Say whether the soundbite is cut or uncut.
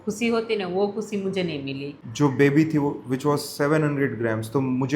cut